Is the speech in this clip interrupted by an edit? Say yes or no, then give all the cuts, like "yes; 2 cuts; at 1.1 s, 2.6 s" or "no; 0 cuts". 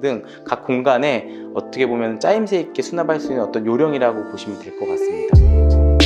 yes; 1 cut; at 5.1 s